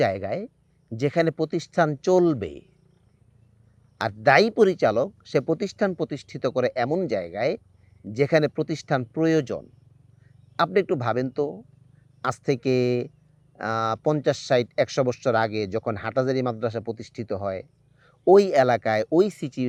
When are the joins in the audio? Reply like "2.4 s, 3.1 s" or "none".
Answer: none